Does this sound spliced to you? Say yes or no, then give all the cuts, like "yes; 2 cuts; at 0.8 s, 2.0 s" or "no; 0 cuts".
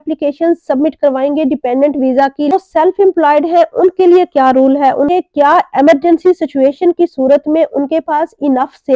yes; 2 cuts; at 2.5 s, 5.1 s